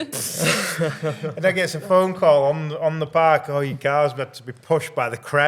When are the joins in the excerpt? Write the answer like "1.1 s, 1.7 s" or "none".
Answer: none